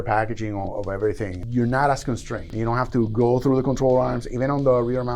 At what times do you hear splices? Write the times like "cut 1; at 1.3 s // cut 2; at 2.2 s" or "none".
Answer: cut 1; at 1.4 s // cut 2; at 2.5 s